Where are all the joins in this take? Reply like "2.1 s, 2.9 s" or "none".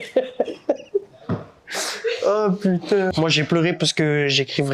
3.1 s